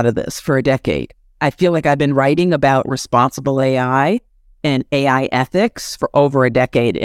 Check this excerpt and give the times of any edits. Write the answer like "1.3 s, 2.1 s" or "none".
none